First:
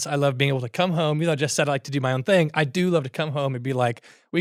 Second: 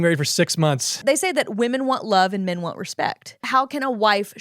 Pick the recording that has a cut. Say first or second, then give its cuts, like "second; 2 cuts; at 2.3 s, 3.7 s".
second; 2 cuts; at 1.0 s, 3.4 s